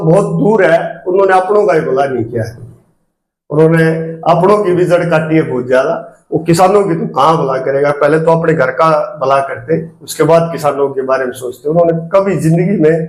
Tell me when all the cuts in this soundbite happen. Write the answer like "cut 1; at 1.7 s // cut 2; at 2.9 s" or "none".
none